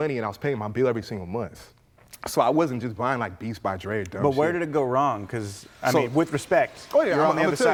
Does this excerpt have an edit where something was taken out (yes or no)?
no